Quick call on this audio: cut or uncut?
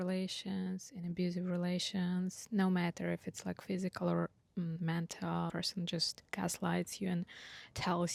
uncut